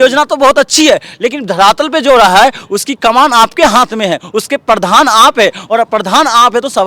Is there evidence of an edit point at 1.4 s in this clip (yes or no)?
no